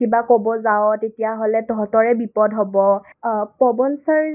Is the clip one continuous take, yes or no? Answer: no